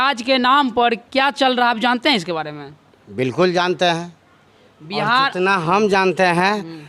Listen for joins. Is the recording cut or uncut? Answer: uncut